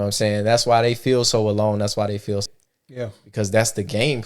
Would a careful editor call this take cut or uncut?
cut